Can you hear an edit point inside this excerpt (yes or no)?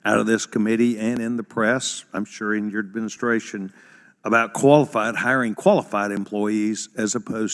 no